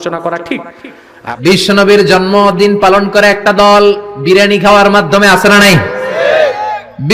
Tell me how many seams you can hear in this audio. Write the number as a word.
one